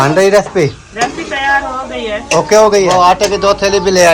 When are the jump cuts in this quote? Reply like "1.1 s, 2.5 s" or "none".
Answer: 2.9 s